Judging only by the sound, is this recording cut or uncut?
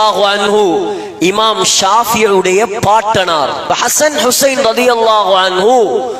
cut